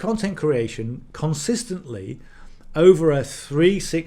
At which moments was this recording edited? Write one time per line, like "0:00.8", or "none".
none